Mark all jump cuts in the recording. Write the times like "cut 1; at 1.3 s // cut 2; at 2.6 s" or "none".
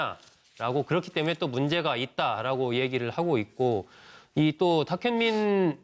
cut 1; at 3.8 s